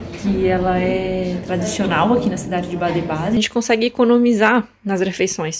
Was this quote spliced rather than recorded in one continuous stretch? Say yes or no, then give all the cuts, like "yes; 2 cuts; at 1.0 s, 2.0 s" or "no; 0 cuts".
yes; 1 cut; at 3.4 s